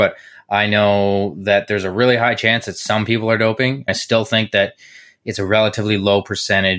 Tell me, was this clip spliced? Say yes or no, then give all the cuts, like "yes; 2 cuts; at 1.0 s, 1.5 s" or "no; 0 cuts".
yes; 1 cut; at 3.9 s